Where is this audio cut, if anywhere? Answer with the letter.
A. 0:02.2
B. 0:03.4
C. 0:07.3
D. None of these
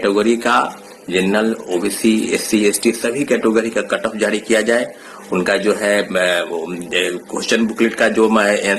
D